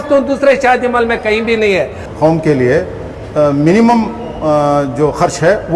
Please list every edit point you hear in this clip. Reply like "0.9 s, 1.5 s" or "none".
2.0 s